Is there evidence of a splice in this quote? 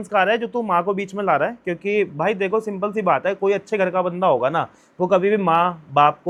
no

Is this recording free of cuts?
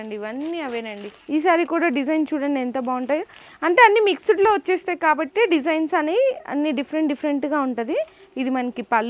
yes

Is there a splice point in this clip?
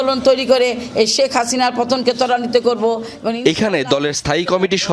no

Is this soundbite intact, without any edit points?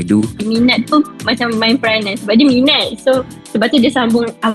yes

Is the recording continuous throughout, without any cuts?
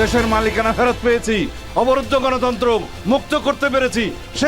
yes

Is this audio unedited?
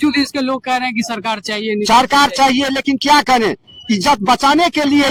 yes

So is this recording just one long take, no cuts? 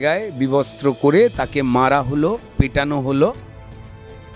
yes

